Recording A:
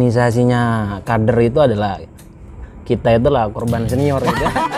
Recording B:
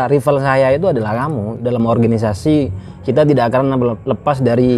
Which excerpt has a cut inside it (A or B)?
B